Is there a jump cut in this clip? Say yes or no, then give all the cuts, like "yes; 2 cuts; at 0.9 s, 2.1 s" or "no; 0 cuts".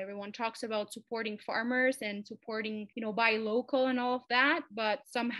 yes; 1 cut; at 2.9 s